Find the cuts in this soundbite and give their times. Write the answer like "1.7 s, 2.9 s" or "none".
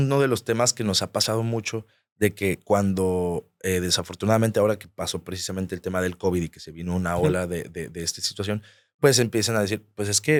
none